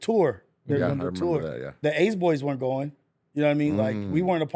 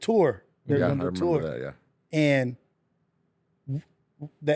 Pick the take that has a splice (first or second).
first